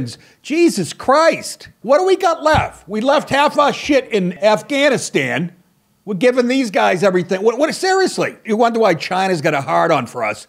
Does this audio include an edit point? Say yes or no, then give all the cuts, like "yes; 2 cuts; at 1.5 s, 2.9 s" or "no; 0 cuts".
yes; 3 cuts; at 1.8 s, 4.3 s, 8.4 s